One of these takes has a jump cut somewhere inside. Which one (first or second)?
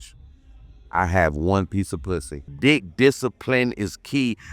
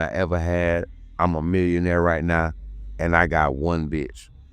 first